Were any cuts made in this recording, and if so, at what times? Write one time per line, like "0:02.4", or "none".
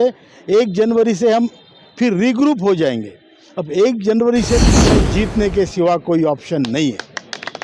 0:04.8